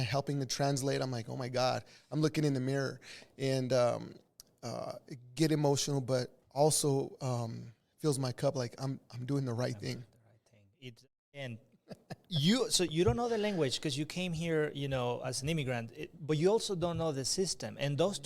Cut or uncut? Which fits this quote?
cut